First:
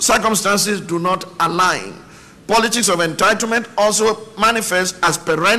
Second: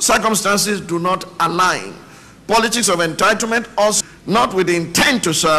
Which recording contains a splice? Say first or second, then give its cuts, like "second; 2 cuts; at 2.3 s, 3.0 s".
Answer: second; 1 cut; at 4.0 s